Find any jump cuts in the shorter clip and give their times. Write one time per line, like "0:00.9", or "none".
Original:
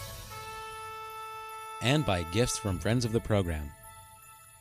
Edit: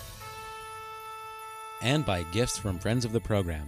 none